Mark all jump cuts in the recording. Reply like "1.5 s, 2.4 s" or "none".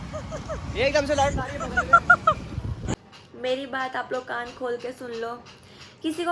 2.9 s